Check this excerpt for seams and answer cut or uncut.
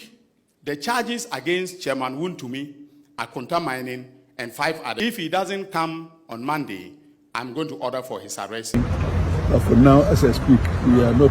cut